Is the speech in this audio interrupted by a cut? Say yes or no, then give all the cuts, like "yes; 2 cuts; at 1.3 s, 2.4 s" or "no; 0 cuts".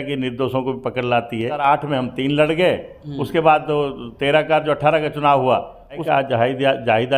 yes; 2 cuts; at 1.6 s, 6.0 s